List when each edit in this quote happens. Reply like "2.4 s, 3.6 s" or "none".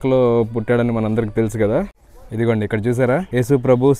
1.9 s